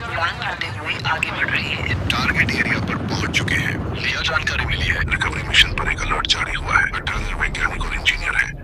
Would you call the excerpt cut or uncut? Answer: cut